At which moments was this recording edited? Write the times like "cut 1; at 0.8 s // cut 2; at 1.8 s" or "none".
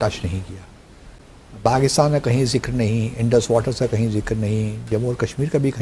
none